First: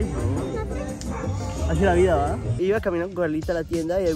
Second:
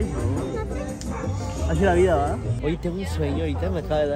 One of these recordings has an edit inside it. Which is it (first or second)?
first